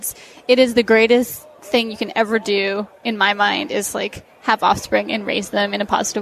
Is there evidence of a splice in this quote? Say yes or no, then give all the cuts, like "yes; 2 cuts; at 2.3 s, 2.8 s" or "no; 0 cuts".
no; 0 cuts